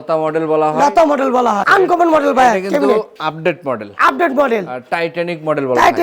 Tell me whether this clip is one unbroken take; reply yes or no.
no